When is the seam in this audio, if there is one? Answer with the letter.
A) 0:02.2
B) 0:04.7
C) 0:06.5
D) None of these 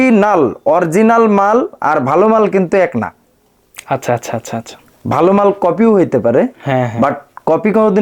D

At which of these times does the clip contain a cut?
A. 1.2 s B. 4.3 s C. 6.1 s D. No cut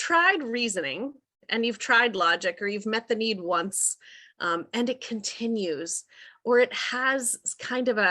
D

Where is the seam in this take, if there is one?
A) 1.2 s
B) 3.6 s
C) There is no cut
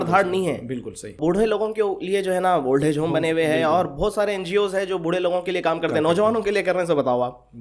A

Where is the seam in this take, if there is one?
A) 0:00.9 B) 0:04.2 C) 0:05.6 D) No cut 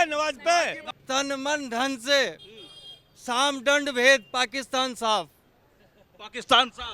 A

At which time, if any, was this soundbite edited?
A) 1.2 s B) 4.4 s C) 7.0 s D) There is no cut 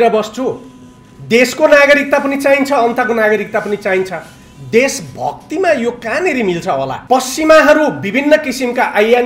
C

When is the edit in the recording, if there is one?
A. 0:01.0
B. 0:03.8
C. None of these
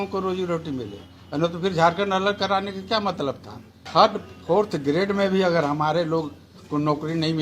B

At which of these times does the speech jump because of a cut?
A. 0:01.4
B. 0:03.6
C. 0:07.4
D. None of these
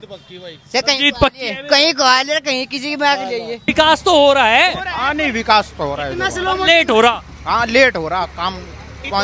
B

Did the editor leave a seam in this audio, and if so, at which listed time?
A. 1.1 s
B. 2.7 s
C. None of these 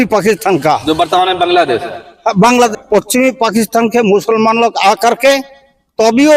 B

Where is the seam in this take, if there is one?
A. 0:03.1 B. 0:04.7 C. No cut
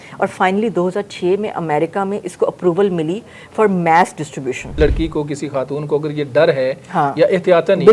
B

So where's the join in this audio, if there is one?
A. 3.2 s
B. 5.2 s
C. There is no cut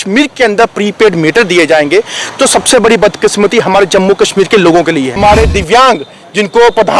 B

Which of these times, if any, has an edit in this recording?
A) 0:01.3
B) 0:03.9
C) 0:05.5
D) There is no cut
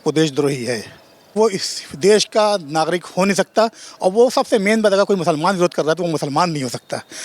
A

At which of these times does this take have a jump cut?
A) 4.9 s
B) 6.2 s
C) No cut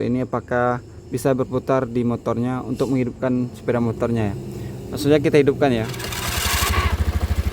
B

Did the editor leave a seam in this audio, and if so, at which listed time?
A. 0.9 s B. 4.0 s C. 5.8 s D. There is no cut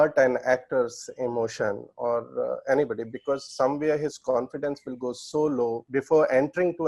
C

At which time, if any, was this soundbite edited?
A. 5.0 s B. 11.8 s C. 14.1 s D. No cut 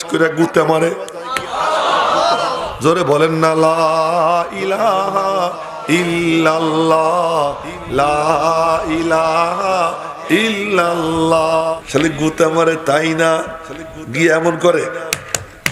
B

